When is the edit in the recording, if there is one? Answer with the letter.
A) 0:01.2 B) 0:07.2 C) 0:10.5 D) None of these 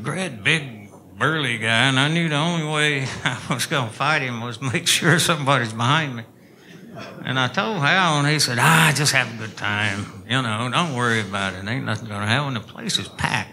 D